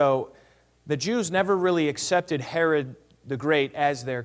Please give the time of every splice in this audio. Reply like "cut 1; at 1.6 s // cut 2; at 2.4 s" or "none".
cut 1; at 2.4 s